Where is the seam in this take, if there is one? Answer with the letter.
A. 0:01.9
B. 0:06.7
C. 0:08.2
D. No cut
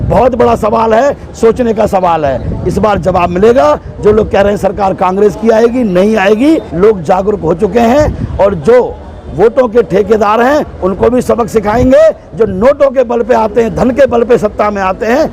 B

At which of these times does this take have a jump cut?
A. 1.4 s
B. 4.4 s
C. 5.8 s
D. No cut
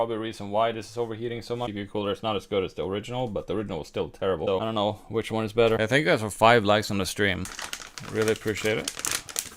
C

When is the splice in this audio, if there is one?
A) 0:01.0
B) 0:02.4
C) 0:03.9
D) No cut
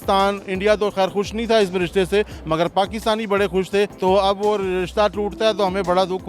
C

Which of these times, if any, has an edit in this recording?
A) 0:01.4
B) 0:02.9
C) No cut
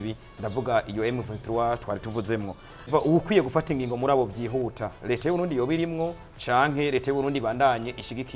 B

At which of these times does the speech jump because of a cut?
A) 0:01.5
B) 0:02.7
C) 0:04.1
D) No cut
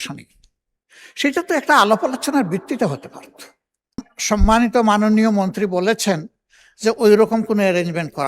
C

